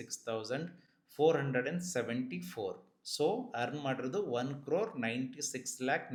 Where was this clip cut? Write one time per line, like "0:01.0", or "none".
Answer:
none